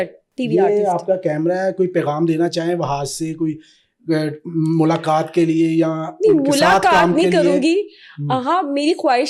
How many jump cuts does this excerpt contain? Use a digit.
0